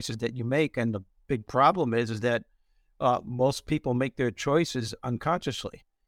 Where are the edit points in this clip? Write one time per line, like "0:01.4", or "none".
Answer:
none